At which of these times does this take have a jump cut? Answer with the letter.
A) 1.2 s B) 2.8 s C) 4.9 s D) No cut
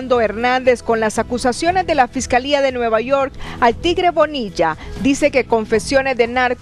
D